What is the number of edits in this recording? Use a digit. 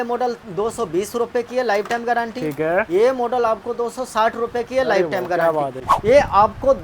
1